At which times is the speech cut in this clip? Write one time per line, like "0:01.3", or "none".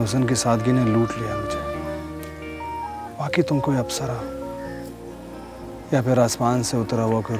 0:02.6
0:05.8